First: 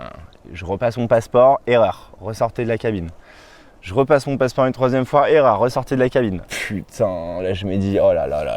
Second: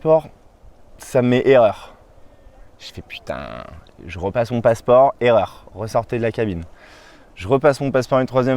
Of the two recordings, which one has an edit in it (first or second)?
first